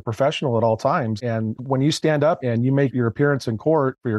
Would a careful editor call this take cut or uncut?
cut